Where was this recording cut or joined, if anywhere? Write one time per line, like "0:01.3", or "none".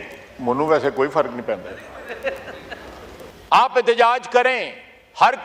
0:03.3

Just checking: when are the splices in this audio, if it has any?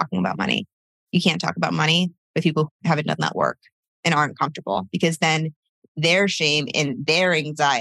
0:02.7

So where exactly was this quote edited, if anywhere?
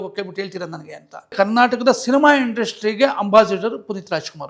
0:01.3

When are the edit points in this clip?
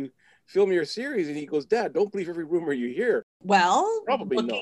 0:03.3

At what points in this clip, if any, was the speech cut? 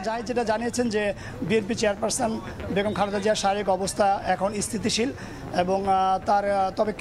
none

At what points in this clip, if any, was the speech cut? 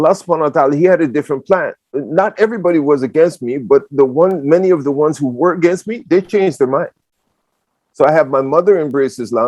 0:02.0

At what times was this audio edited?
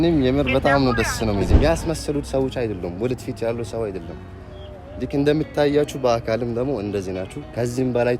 0:01.5

